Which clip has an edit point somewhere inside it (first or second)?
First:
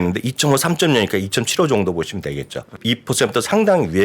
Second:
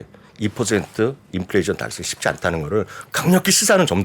first